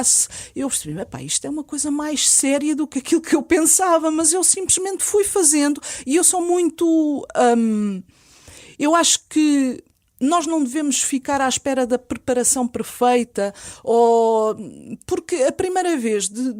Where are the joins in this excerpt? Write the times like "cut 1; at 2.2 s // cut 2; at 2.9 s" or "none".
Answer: none